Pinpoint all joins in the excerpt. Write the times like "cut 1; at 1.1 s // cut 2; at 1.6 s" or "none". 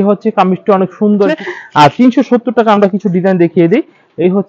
cut 1; at 1.4 s